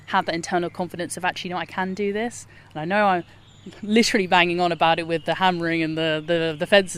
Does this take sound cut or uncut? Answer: uncut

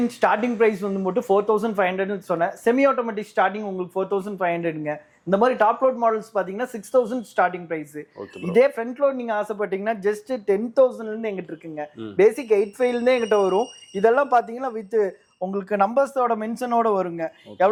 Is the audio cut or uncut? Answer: uncut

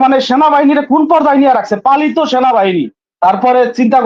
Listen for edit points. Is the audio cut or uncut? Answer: cut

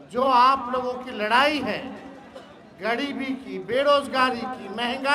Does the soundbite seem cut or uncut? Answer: uncut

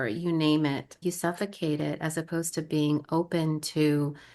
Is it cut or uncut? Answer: cut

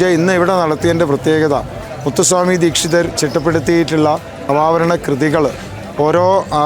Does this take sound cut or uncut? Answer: cut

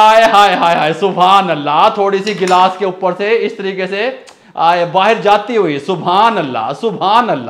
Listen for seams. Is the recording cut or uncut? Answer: uncut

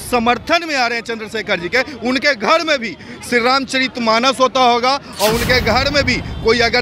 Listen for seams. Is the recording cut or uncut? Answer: uncut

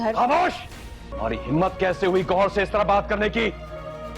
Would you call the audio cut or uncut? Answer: cut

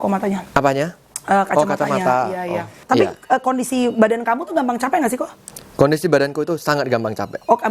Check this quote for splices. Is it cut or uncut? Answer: cut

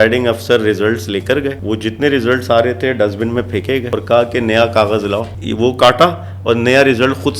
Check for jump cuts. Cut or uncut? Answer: cut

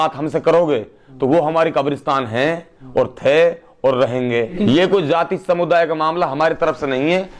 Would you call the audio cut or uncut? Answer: cut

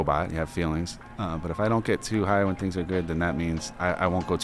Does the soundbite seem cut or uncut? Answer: uncut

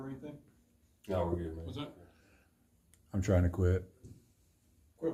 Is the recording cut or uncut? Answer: uncut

